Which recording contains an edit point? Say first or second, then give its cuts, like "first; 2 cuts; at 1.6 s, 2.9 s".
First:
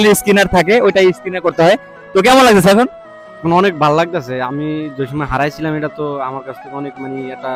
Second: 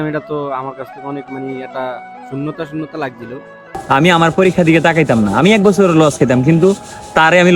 second; 1 cut; at 3.7 s